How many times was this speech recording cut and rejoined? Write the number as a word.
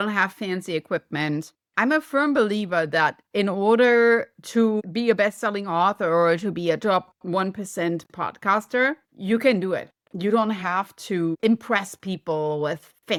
zero